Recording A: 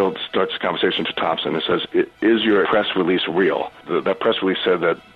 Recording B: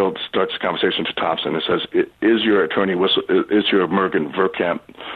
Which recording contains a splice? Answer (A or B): A